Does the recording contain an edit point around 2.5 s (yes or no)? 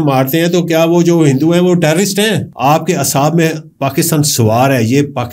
yes